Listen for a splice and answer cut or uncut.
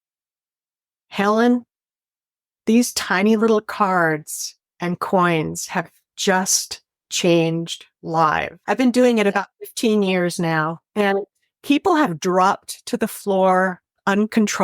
cut